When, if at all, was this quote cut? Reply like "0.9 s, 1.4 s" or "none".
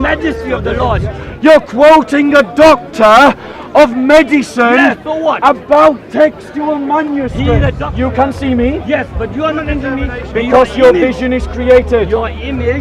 1.3 s, 7.8 s